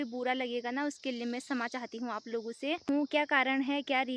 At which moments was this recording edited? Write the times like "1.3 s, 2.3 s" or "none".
2.9 s